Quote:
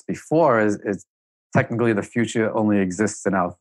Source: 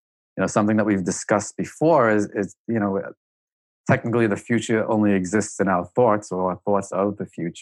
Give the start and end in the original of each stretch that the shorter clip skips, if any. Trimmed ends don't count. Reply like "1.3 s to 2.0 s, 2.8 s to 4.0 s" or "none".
2.6 s to 3.4 s